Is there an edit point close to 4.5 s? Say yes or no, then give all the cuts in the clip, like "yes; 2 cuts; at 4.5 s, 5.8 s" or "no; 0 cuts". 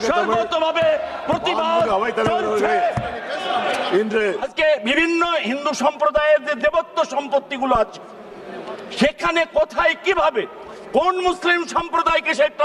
yes; 1 cut; at 4.5 s